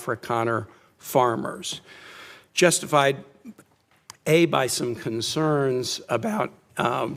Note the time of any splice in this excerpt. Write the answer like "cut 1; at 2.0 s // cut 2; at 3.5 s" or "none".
none